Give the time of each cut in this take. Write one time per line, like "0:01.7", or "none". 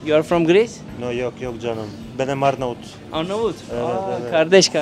none